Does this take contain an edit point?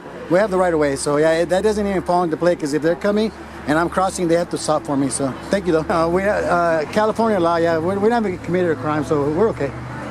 yes; 1 cut; at 5.9 s

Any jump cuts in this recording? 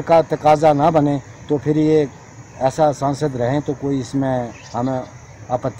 no; 0 cuts

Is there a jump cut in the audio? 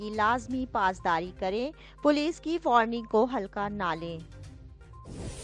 yes; 1 cut; at 4.5 s

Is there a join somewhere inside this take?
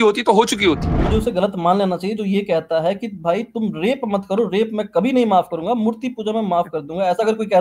yes; 1 cut; at 0.9 s

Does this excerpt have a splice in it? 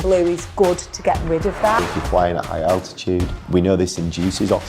yes; 2 cuts; at 1.8 s, 3.4 s

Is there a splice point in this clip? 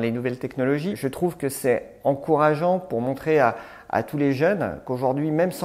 yes; 1 cut; at 1.0 s

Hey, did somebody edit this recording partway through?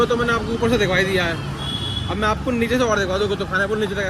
no; 0 cuts

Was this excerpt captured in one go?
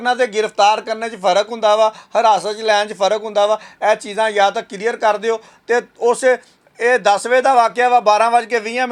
yes; 0 cuts

